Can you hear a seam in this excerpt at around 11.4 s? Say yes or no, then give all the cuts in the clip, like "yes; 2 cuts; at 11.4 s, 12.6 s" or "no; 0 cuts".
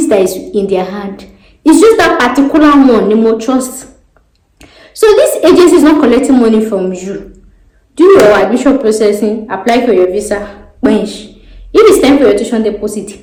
no; 0 cuts